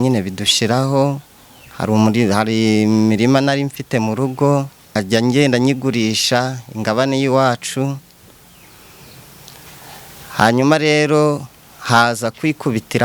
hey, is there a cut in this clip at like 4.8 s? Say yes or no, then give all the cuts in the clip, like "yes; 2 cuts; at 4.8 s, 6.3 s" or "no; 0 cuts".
yes; 1 cut; at 4.8 s